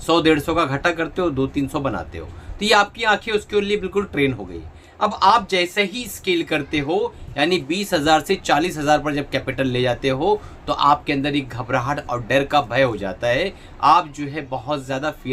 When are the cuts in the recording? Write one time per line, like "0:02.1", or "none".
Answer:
none